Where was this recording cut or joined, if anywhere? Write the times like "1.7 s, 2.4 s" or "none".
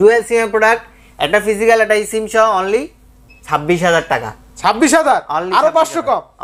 none